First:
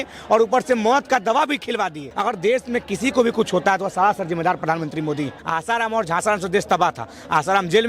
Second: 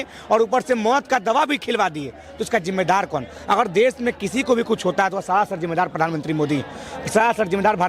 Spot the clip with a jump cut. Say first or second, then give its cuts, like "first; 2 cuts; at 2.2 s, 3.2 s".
first; 2 cuts; at 2.1 s, 5.4 s